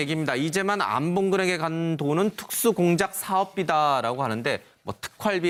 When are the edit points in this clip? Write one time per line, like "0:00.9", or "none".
none

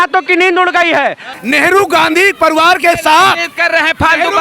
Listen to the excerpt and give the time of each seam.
0:01.3

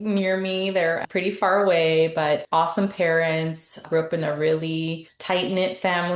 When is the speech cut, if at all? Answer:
0:01.0
0:02.4
0:03.8
0:05.1

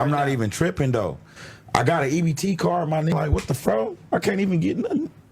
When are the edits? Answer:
0:03.5

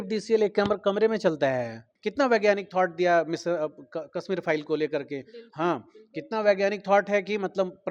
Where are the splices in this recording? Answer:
0:01.9

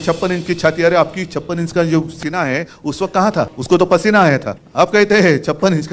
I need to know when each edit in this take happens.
0:03.6
0:04.6

